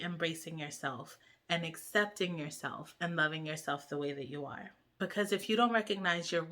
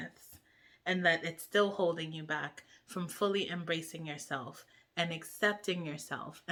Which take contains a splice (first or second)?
first